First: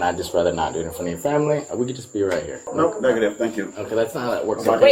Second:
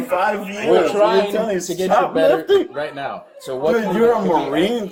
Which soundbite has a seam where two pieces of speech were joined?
first; 1 cut; at 2.6 s

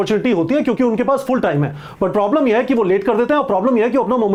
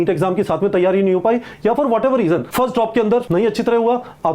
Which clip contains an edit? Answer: second; 2 cuts; at 2.5 s, 3.3 s

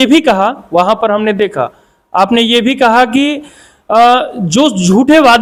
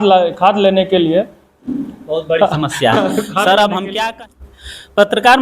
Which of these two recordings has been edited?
second; 1 cut; at 4.1 s

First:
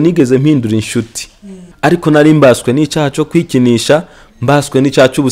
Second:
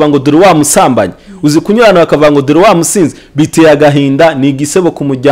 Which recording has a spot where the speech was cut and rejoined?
first; 1 cut; at 1.7 s

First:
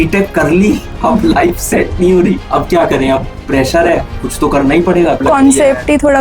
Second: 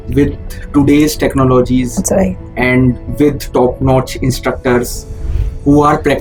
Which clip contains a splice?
first; 4 cuts; at 0.9 s, 2.4 s, 4.2 s, 5.2 s

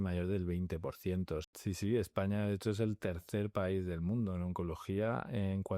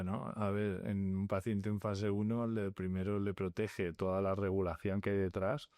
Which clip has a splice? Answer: first; 1 cut; at 1.5 s

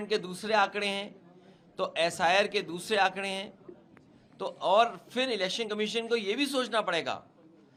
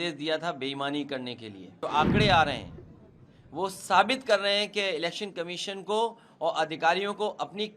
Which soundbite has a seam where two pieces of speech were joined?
second; 1 cut; at 1.8 s

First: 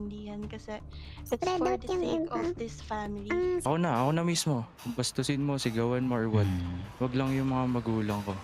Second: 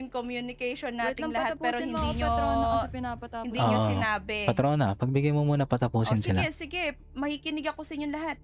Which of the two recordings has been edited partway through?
first; 1 cut; at 3.6 s

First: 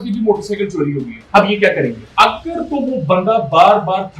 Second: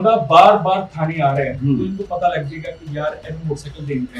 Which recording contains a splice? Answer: first; 2 cuts; at 1.1 s, 2.0 s

